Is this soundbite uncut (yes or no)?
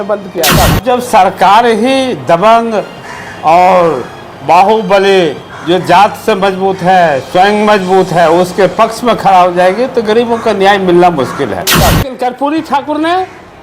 no